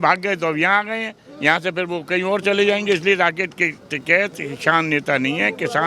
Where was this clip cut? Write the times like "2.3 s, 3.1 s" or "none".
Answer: none

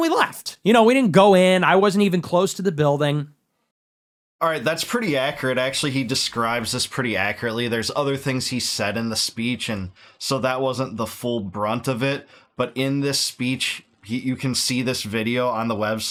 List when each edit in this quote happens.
none

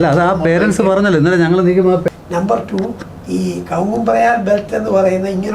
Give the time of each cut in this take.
2.0 s

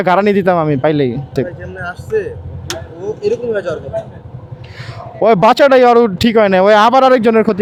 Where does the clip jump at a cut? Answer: none

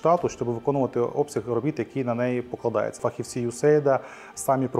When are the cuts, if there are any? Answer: 3.0 s

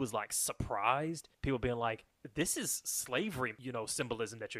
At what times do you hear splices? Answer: 1.3 s, 2.1 s, 3.6 s

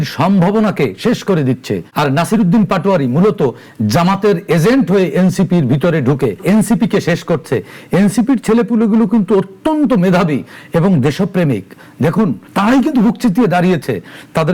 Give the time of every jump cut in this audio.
1.8 s, 6.4 s, 12.4 s

